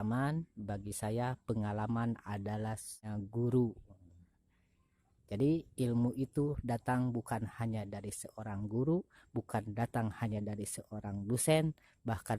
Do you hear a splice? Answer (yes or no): yes